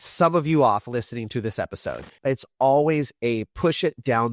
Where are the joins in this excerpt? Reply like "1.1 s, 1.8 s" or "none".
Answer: 2.1 s